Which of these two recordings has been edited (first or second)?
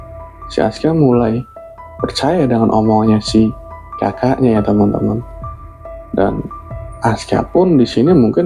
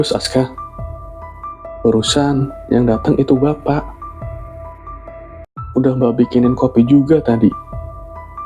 second